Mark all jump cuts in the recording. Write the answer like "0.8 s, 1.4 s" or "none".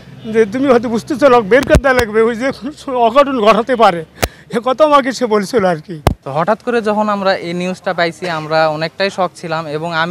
6.2 s